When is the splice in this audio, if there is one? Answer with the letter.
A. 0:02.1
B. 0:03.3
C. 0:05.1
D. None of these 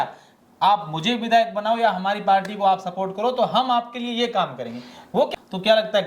C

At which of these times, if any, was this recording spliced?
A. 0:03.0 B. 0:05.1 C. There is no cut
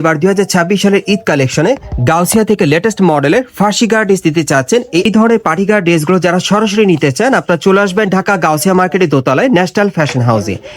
B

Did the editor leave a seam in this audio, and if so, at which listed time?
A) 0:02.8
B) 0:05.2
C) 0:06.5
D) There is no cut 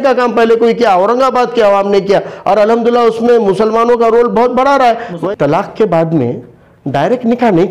B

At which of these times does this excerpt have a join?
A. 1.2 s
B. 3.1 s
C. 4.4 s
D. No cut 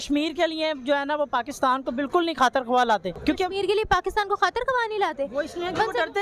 B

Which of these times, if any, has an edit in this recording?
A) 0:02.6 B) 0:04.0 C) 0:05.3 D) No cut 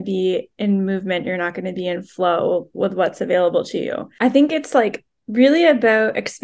B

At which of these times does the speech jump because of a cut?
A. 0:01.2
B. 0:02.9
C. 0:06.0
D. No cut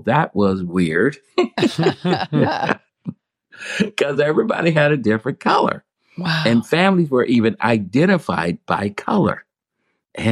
B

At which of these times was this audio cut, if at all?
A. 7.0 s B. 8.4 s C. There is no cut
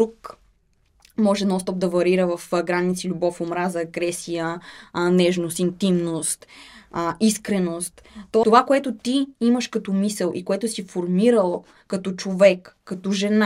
B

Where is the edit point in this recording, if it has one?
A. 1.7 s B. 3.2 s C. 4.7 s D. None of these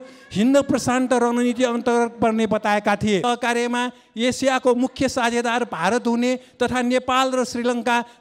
B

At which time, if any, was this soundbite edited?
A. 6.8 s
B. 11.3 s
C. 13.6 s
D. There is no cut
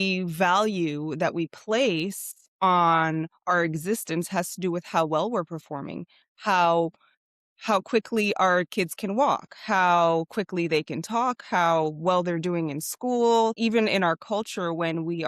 C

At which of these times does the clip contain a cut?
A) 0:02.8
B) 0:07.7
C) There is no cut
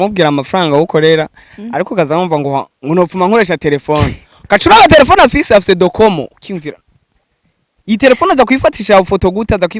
C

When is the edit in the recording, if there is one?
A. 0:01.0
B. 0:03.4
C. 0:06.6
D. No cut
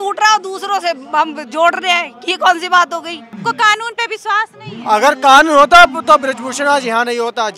B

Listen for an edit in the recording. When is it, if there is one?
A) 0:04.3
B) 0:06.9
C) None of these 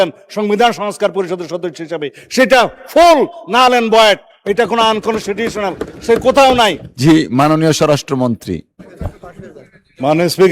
B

